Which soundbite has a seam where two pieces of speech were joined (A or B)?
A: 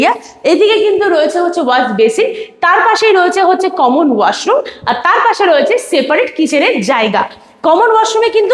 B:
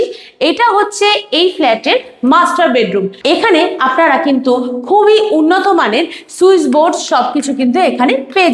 B